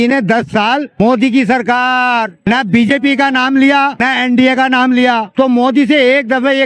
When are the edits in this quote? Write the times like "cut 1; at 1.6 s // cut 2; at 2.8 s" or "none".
cut 1; at 1.0 s // cut 2; at 2.4 s // cut 3; at 4.1 s // cut 4; at 5.3 s

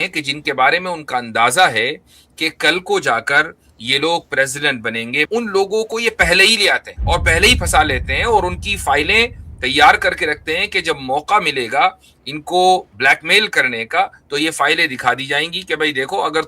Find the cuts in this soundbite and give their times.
cut 1; at 5.3 s // cut 2; at 6.9 s

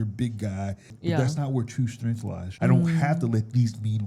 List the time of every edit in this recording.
cut 1; at 0.9 s // cut 2; at 2.5 s

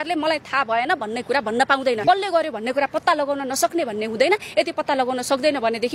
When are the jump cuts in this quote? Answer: cut 1; at 2.0 s

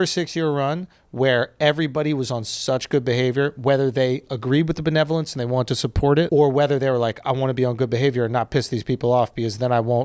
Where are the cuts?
cut 1; at 6.3 s

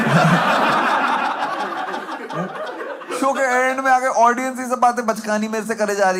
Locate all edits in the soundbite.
none

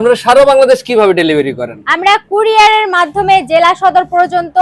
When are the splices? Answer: none

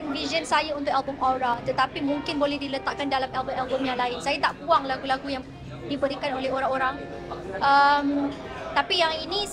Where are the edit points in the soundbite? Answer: none

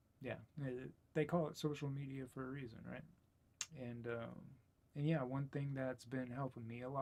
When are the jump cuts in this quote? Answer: none

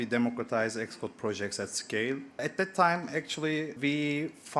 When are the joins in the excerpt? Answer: cut 1; at 2.4 s // cut 2; at 3.7 s

